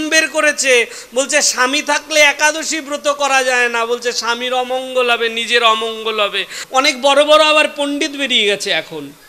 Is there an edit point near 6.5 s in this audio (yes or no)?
yes